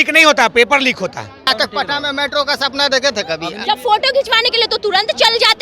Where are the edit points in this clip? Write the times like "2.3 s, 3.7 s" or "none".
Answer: 1.5 s, 3.5 s